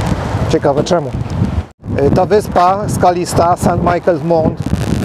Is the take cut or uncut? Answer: uncut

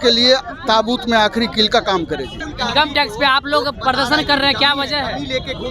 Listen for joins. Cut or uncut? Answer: uncut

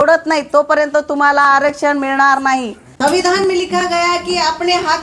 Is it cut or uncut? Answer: cut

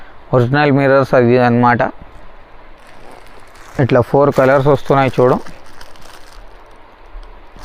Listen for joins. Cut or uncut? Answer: uncut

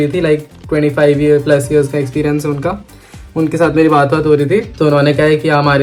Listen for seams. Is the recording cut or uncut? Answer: uncut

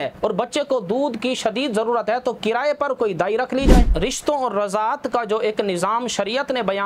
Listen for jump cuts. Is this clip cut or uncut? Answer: cut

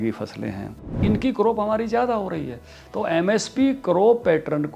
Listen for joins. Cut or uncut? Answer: cut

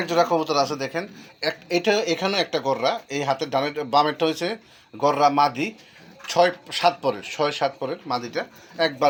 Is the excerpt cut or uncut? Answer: uncut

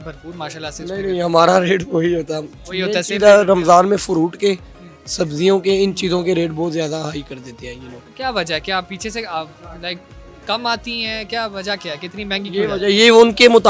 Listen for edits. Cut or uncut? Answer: uncut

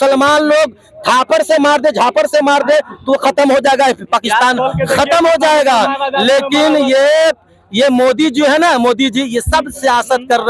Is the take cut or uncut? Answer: uncut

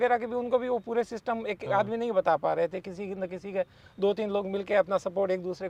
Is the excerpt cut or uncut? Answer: uncut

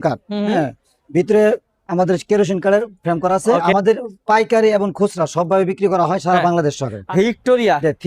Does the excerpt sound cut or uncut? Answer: cut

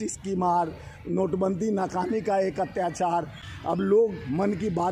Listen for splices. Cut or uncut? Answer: cut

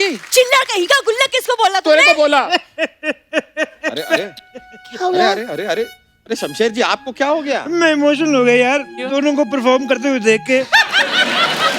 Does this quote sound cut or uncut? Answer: uncut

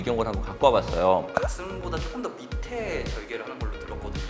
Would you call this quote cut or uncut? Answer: cut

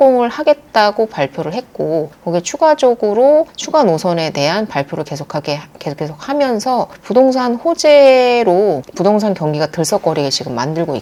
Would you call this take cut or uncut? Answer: uncut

